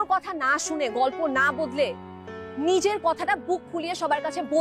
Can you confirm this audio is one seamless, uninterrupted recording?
yes; 0 cuts

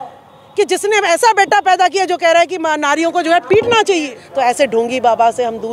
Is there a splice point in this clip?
yes; 1 cut; at 4.2 s

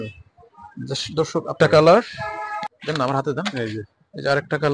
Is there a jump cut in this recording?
yes; 2 cuts; at 1.5 s, 2.7 s

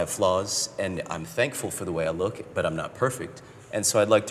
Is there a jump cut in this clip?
no; 0 cuts

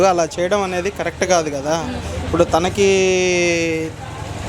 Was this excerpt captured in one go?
yes; 0 cuts

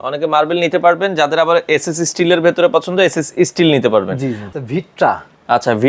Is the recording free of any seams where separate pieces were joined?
no; 1 cut; at 4.5 s

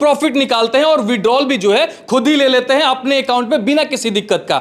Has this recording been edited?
no; 0 cuts

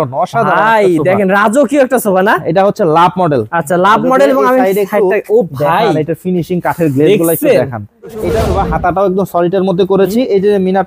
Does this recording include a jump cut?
yes; 1 cut; at 8.2 s

